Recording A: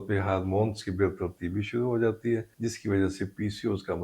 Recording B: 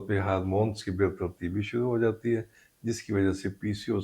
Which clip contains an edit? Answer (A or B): A